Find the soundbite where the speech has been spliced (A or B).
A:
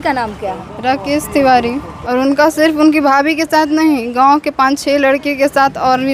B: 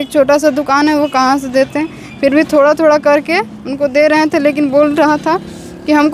A